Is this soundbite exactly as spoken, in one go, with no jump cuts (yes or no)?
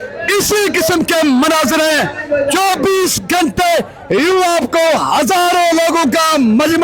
yes